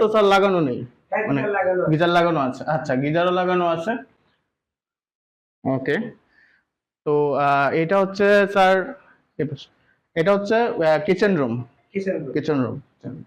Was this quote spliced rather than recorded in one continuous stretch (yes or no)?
no